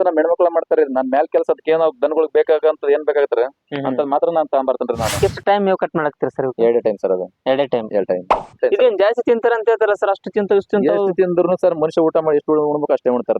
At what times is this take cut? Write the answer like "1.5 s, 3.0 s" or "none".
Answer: 5.2 s, 8.6 s